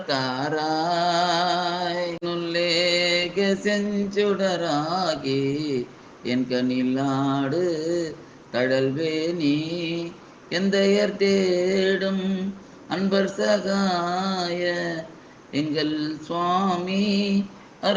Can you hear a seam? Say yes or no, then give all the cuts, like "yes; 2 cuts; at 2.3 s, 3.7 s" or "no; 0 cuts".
yes; 1 cut; at 2.2 s